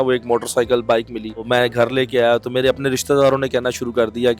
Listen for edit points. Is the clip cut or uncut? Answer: cut